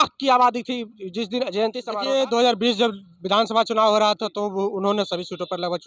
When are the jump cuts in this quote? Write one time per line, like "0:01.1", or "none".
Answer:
0:01.8